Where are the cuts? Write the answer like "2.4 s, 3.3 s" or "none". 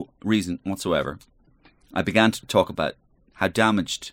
2.4 s